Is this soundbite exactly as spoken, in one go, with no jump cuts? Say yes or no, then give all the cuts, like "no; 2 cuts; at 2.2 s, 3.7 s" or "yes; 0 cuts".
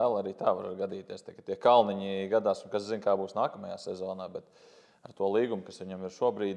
yes; 0 cuts